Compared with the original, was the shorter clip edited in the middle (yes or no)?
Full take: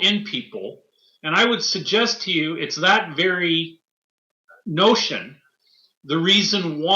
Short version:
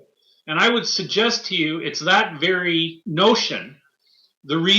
yes